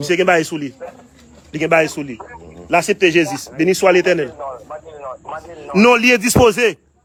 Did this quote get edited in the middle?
no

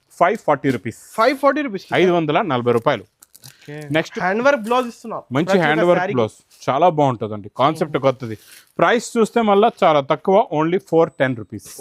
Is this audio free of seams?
no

